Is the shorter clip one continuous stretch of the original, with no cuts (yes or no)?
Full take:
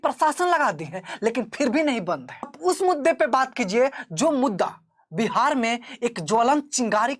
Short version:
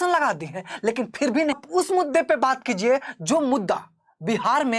no